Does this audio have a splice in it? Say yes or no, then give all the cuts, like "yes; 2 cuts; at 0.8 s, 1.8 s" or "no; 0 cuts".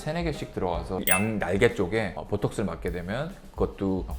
yes; 1 cut; at 1.0 s